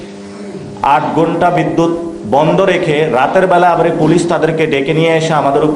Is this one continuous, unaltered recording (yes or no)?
yes